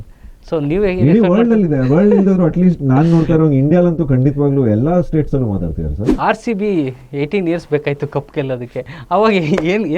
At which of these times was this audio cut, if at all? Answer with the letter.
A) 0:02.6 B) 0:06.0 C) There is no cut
B